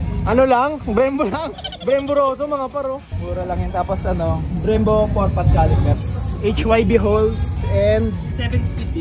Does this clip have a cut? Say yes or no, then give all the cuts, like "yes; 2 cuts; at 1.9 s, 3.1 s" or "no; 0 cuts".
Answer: no; 0 cuts